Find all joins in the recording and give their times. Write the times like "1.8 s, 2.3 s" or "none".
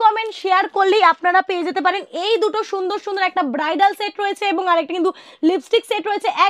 none